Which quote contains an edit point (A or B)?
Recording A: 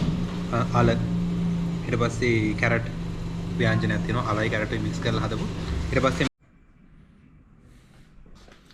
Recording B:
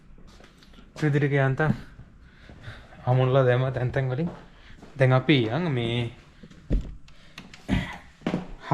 A